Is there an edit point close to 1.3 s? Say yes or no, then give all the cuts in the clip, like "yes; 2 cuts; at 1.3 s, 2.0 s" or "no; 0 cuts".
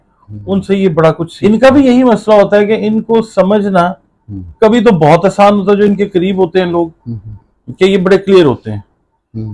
yes; 1 cut; at 1.3 s